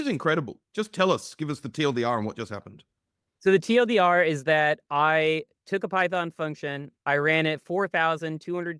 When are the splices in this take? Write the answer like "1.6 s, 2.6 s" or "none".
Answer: none